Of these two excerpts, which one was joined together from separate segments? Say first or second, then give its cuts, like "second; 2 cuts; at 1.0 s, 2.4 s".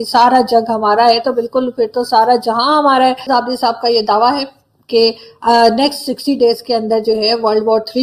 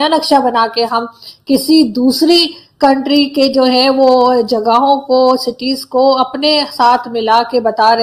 first; 1 cut; at 3.3 s